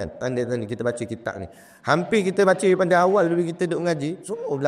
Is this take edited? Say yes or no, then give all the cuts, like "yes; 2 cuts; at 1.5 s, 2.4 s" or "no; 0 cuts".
no; 0 cuts